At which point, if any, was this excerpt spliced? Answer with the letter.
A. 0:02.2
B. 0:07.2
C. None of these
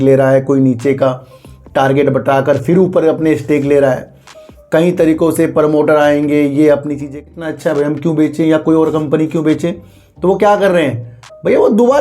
B